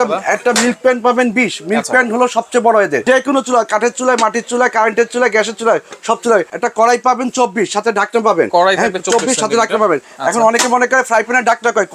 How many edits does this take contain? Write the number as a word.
two